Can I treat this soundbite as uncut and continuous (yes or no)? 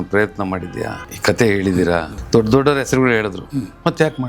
no